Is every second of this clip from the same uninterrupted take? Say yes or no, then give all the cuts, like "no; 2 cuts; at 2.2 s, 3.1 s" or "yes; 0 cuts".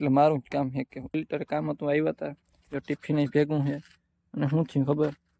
no; 1 cut; at 1.0 s